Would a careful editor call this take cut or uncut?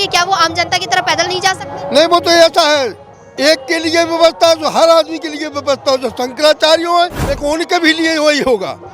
cut